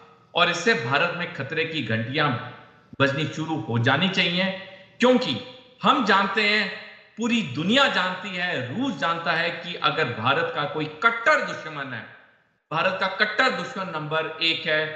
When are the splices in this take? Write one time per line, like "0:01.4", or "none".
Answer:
none